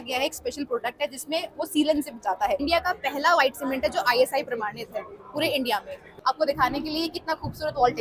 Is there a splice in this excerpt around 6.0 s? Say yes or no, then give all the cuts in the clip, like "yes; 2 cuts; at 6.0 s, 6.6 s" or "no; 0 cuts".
yes; 2 cuts; at 2.6 s, 6.0 s